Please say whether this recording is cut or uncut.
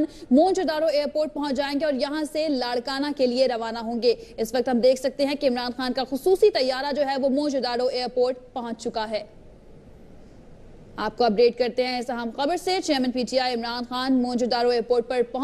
cut